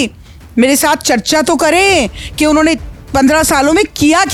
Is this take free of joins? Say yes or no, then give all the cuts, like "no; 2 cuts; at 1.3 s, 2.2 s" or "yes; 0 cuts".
yes; 0 cuts